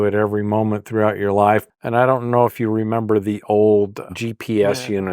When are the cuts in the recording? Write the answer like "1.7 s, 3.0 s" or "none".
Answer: 1.7 s, 4.1 s